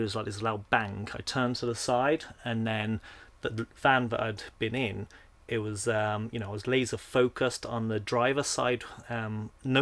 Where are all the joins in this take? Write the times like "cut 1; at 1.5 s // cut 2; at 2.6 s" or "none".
none